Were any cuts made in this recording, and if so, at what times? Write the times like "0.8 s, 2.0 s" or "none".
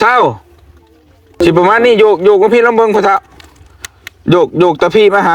1.2 s